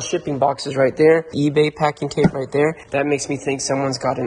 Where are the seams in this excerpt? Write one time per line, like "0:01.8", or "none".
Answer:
0:01.3
0:02.8